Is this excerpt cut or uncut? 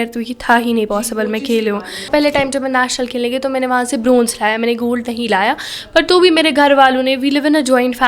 cut